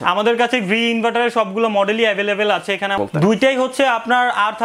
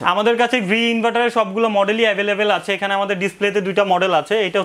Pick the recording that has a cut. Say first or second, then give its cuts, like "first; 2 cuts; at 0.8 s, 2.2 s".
first; 1 cut; at 3.0 s